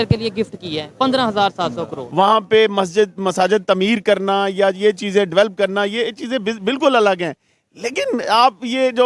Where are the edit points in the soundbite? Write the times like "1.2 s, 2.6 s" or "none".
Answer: none